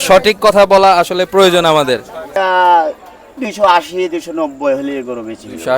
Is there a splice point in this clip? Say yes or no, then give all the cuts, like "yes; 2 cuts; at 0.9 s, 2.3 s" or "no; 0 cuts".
yes; 1 cut; at 2.4 s